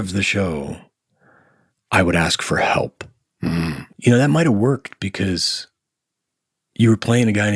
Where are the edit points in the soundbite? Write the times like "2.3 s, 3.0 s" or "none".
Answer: 3.8 s